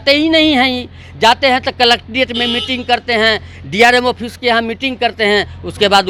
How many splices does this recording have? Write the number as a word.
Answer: zero